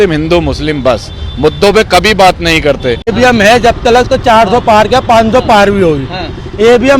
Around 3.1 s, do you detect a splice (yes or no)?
yes